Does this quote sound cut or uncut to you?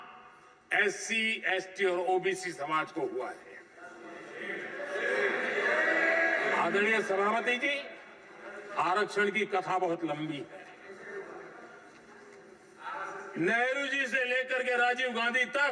uncut